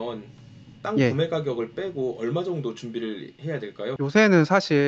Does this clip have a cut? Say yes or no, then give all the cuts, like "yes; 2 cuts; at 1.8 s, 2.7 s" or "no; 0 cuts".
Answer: yes; 1 cut; at 4.0 s